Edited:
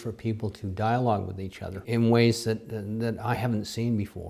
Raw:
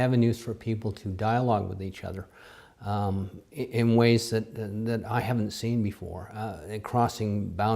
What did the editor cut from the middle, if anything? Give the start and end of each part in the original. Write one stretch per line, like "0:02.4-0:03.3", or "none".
0:02.2-0:03.7